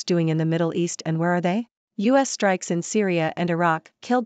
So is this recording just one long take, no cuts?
no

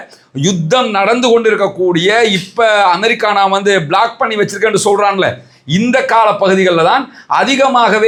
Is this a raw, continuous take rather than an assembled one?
yes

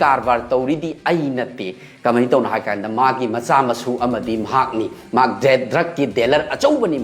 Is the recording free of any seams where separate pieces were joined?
yes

